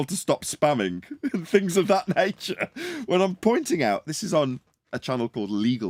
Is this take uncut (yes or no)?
yes